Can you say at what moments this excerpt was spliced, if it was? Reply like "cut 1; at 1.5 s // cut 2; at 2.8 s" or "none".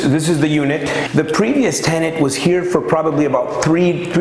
cut 1; at 1.1 s